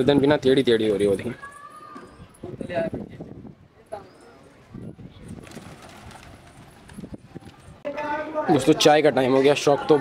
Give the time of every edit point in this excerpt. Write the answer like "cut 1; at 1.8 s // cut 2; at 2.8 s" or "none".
cut 1; at 7.9 s